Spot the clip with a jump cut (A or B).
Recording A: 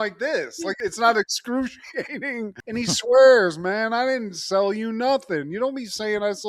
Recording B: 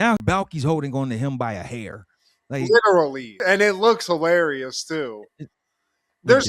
A